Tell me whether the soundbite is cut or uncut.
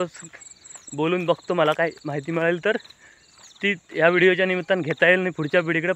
uncut